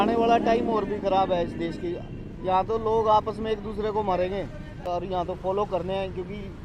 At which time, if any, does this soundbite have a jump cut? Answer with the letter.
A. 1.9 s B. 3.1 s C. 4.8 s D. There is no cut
C